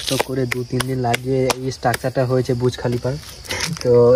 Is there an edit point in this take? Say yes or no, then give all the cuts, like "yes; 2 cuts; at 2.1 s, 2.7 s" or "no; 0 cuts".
no; 0 cuts